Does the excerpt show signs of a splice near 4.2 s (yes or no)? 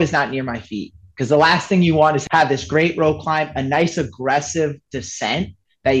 no